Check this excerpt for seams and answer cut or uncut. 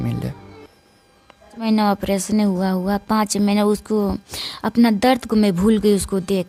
cut